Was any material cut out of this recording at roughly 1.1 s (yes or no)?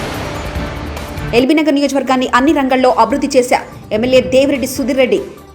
yes